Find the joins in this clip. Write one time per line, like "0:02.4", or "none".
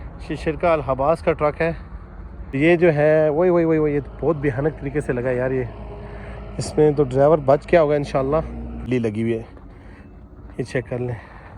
0:02.6
0:08.9